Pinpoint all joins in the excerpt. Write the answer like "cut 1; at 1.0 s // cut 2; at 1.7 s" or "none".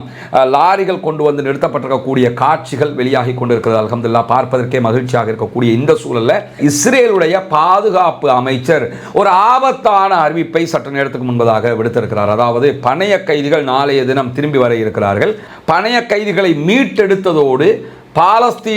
cut 1; at 6.5 s